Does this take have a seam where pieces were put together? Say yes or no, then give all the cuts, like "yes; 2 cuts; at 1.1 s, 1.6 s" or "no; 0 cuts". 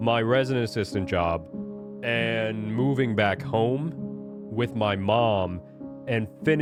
no; 0 cuts